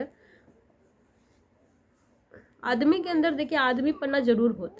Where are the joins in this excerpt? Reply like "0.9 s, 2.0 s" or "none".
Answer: 2.6 s